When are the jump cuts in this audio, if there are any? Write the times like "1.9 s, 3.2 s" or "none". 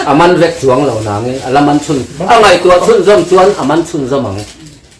none